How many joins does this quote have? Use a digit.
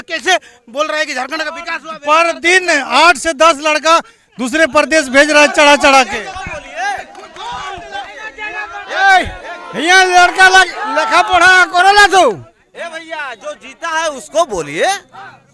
0